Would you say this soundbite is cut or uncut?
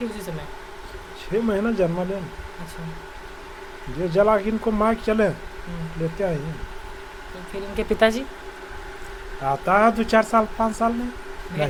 uncut